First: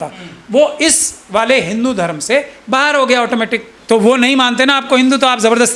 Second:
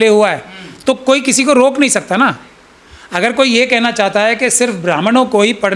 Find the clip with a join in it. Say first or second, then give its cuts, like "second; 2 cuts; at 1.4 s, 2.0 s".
first; 1 cut; at 3.8 s